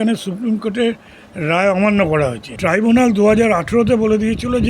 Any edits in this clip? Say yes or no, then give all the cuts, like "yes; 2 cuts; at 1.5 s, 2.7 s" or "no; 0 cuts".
yes; 1 cut; at 2.5 s